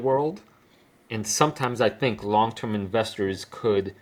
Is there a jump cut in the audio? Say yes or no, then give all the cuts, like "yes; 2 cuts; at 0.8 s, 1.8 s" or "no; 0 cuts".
no; 0 cuts